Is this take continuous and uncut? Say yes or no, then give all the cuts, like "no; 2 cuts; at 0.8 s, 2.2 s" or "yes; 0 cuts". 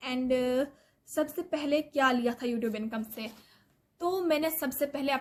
yes; 0 cuts